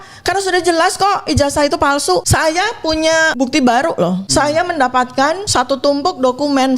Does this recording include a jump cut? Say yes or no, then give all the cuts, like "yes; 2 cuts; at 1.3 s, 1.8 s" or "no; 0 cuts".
yes; 4 cuts; at 2.3 s, 3.3 s, 4.2 s, 5.4 s